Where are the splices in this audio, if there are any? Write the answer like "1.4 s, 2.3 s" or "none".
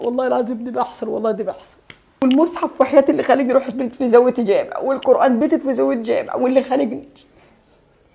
2.1 s